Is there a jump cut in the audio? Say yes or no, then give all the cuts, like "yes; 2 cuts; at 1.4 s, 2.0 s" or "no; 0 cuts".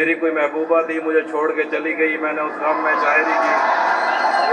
no; 0 cuts